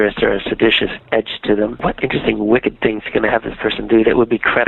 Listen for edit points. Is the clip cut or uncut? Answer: cut